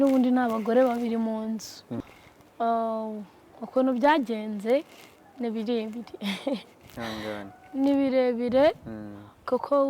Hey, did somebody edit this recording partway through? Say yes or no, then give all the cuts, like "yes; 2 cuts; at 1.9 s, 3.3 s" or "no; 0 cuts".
yes; 1 cut; at 2.0 s